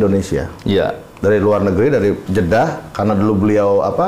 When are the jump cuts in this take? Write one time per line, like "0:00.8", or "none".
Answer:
0:02.2